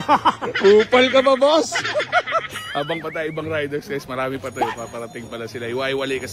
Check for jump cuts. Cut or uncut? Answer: uncut